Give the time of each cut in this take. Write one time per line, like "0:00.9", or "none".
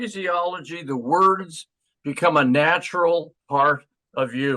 none